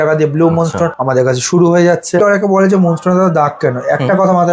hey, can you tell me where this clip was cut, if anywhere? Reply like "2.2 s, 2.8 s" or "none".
1.0 s, 2.2 s